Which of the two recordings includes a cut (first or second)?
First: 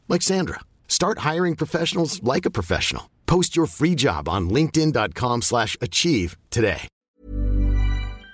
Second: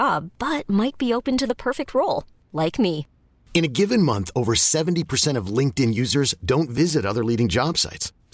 first